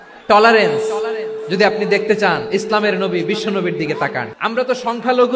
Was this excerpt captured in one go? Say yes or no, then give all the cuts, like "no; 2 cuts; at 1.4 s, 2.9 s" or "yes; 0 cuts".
no; 1 cut; at 4.3 s